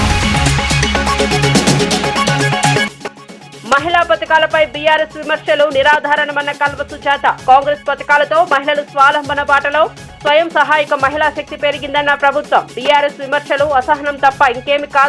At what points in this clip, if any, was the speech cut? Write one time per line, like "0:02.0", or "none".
none